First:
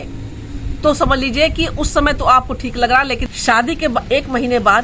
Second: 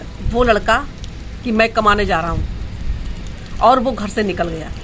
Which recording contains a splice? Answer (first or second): first